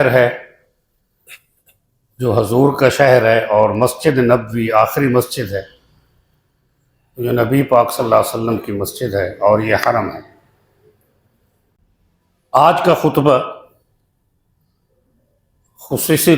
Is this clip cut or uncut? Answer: cut